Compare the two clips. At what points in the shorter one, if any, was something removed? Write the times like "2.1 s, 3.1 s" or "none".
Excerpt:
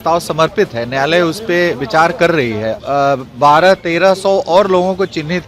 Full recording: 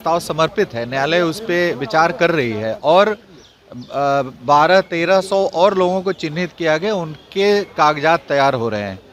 2.7 s